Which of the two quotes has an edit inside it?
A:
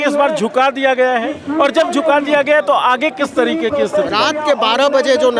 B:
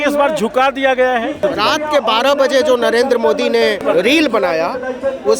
B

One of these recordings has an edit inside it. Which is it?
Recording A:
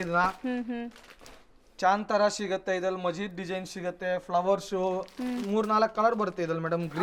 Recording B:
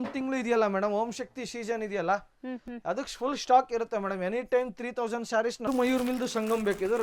B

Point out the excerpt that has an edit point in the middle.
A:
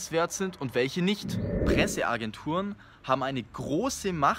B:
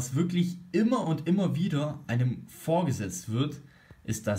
A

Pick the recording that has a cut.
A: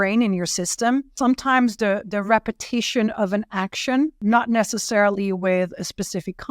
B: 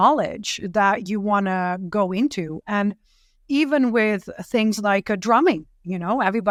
A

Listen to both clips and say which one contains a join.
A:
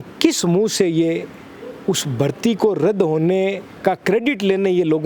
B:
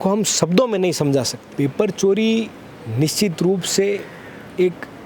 B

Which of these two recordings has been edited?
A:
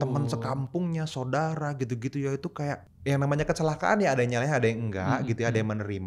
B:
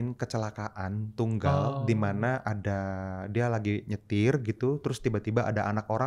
A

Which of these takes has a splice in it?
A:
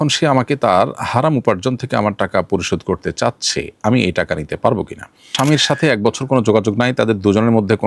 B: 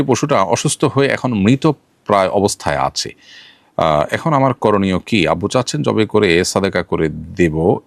A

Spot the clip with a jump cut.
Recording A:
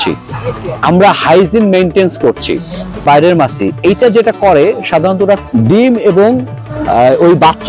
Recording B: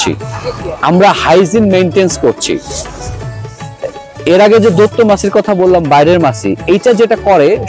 A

